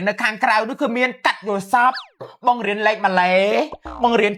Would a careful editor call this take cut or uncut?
uncut